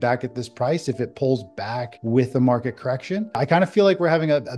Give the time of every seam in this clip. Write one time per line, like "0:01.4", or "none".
0:01.9
0:03.4